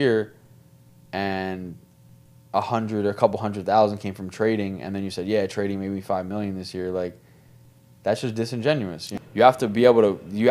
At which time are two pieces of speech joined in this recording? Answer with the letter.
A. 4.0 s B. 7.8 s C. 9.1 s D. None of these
C